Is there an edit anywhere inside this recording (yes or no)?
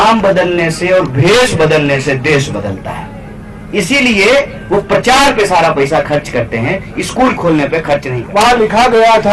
yes